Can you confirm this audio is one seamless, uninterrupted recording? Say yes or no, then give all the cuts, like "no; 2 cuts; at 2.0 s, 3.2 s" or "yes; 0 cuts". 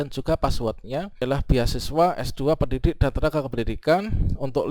no; 1 cut; at 1.1 s